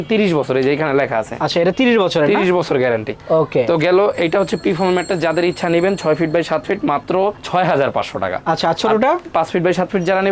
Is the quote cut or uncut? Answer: uncut